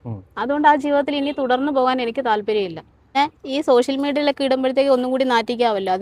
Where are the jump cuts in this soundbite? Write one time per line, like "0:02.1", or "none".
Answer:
0:03.1